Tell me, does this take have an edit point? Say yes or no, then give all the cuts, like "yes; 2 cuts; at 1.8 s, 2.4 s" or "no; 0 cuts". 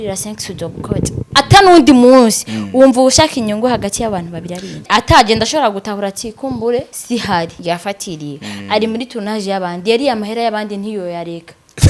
yes; 4 cuts; at 1.2 s, 4.8 s, 7.0 s, 7.6 s